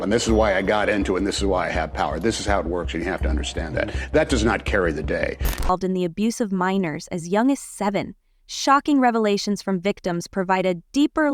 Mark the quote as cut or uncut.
cut